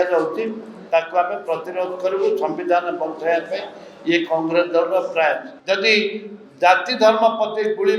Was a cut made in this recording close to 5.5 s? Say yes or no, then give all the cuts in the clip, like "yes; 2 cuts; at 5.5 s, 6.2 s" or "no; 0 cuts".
yes; 1 cut; at 5.5 s